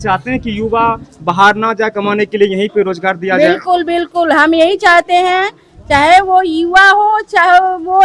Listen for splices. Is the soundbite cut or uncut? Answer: uncut